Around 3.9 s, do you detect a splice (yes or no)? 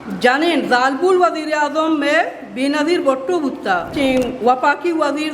yes